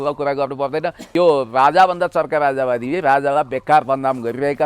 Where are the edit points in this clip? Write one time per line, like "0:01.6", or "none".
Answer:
0:01.0